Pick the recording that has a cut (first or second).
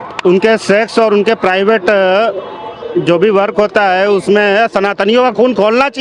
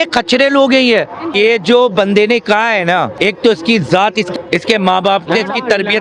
second